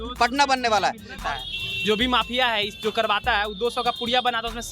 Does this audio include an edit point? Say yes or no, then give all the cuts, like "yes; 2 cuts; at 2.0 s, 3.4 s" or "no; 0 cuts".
yes; 1 cut; at 1.2 s